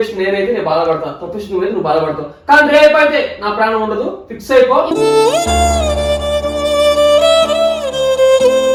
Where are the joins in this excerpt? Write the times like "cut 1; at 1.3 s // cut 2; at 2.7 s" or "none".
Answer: none